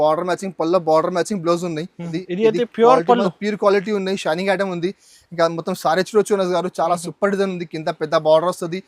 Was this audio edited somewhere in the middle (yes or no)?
yes